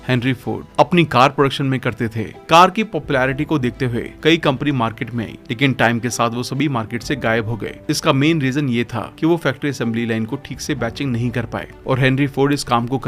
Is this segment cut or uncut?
uncut